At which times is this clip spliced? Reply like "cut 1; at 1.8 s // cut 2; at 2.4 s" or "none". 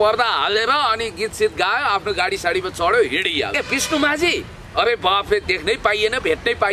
cut 1; at 3.5 s